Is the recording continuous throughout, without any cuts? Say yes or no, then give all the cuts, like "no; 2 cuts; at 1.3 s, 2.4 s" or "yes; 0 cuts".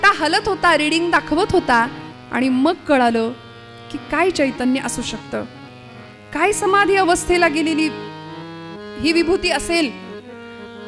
yes; 0 cuts